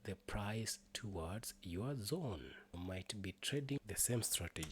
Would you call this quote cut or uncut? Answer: cut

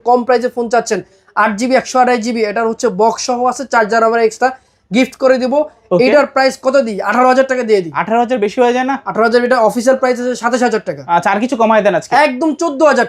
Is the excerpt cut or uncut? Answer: uncut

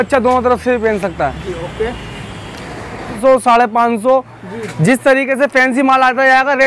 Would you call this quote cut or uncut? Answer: cut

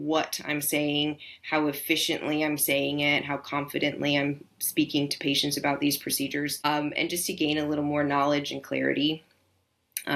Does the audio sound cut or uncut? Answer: cut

